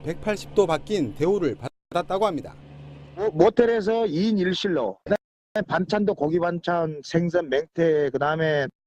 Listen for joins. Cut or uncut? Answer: cut